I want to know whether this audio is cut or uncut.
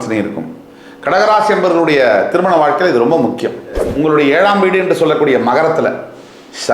cut